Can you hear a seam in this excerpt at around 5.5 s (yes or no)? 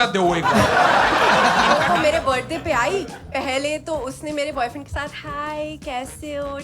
no